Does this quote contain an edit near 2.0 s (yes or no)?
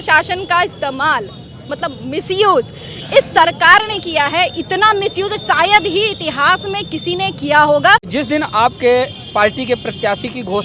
no